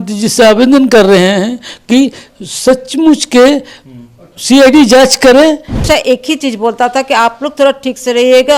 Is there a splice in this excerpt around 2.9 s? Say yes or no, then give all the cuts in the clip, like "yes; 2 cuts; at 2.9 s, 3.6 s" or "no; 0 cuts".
no; 1 cut; at 5.8 s